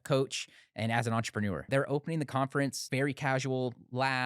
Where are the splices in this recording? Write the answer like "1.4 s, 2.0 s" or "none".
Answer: 1.7 s, 2.8 s